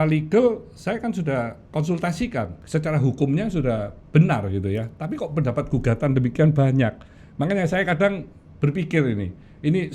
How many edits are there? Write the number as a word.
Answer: one